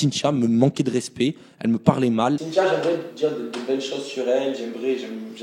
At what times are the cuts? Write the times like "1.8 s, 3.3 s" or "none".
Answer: 2.4 s